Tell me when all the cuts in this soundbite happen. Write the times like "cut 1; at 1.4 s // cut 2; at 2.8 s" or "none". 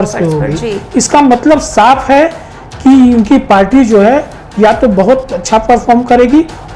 none